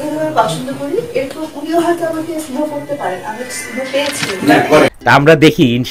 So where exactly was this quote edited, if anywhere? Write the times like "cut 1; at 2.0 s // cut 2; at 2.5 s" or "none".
cut 1; at 4.9 s